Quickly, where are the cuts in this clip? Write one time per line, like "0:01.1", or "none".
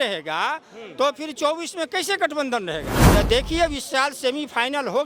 0:02.9